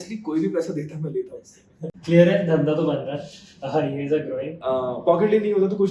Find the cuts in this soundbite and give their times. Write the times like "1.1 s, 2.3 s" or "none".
1.9 s, 4.5 s